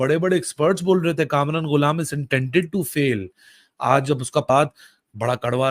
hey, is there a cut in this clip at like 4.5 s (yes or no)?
yes